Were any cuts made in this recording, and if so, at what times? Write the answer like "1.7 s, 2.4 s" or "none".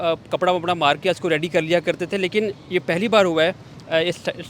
none